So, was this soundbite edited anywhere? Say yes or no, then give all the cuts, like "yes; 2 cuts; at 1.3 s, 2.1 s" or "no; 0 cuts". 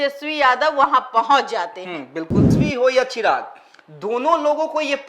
yes; 1 cut; at 2.6 s